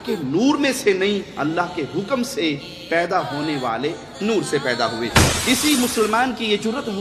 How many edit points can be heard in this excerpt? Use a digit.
1